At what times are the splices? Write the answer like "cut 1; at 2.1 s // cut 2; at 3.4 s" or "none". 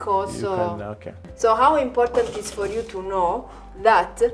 cut 1; at 1.2 s